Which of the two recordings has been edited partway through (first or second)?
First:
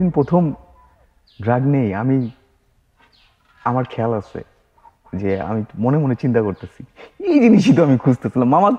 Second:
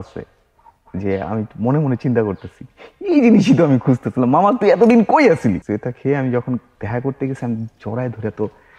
second